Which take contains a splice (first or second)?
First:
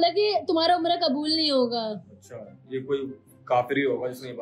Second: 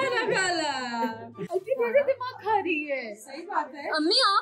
second